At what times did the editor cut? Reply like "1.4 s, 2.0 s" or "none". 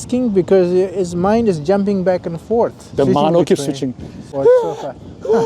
2.8 s, 4.3 s